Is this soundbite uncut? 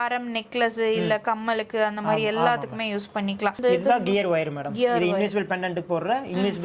no; 1 cut; at 3.6 s

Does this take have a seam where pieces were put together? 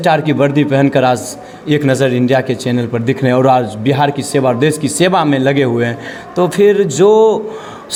no; 0 cuts

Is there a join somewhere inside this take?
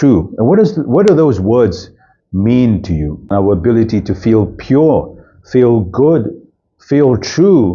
yes; 1 cut; at 3.3 s

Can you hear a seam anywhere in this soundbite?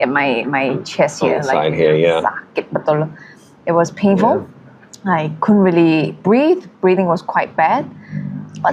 no; 0 cuts

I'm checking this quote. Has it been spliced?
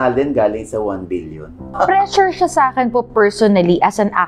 no; 0 cuts

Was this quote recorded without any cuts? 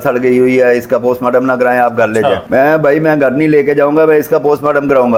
yes; 0 cuts

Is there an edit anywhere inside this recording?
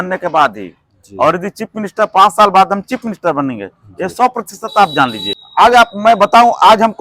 yes; 1 cut; at 5.2 s

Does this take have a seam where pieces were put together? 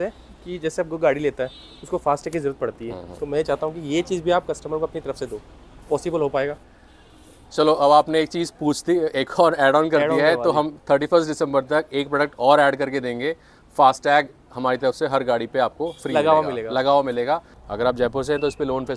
yes; 1 cut; at 17.6 s

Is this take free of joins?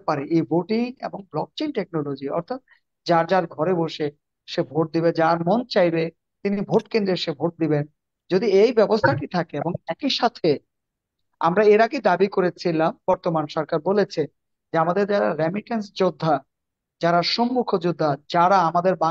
yes; 0 cuts

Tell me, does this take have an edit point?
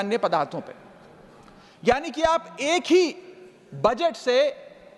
no; 0 cuts

